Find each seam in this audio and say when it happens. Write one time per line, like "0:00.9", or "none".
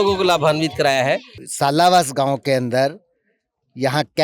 0:01.4